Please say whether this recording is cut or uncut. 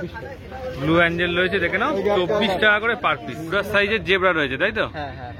cut